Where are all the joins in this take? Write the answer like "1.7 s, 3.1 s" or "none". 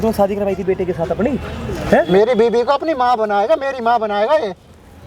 none